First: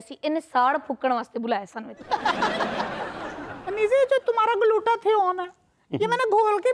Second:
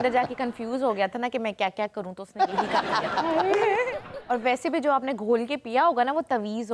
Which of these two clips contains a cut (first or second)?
first